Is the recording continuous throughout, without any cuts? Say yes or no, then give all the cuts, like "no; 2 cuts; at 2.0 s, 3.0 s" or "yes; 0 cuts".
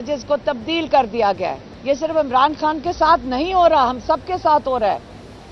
no; 1 cut; at 1.7 s